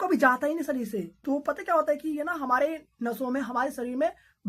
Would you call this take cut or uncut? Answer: cut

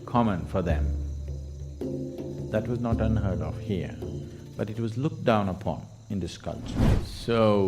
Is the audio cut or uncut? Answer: cut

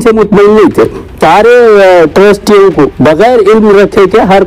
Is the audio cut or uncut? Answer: cut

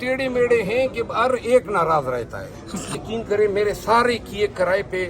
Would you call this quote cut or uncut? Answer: cut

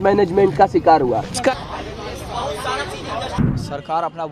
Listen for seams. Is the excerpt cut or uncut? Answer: cut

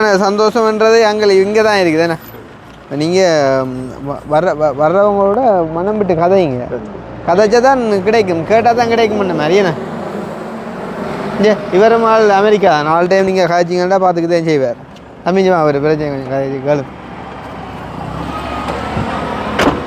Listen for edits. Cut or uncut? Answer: uncut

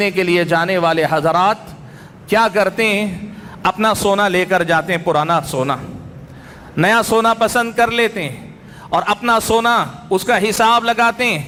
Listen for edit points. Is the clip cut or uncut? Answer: uncut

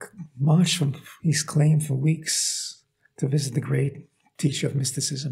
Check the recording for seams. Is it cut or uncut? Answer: uncut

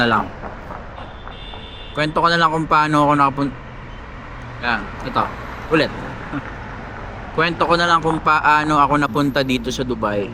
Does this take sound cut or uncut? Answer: uncut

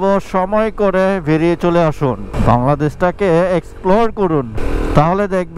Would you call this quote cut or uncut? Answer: cut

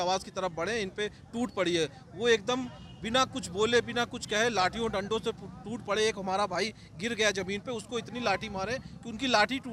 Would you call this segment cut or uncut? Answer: uncut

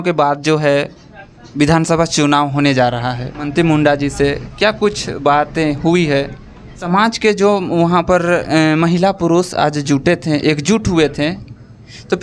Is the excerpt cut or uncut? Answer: cut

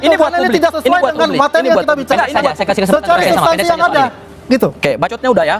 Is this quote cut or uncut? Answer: uncut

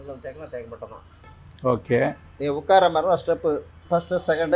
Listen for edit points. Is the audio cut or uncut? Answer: cut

